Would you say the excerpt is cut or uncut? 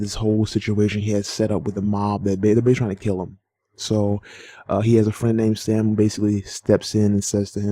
uncut